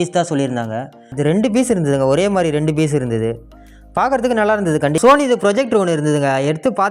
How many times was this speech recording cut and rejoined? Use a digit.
2